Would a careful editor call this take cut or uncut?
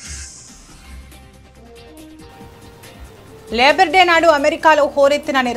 uncut